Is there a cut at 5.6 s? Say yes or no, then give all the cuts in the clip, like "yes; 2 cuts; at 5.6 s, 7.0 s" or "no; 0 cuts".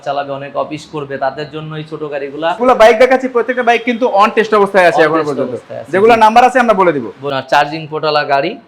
no; 2 cuts; at 2.6 s, 7.3 s